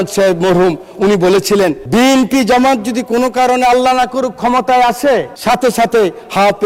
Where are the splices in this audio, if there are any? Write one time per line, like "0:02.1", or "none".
0:01.8
0:05.3